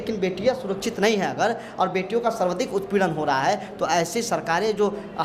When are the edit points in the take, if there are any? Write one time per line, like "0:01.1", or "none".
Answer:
none